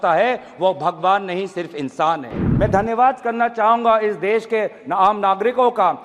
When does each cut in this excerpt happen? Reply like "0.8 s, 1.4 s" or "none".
2.4 s